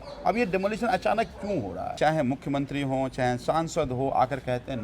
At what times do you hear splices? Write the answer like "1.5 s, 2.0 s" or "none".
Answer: 1.9 s